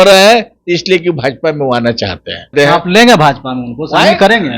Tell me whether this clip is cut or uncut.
cut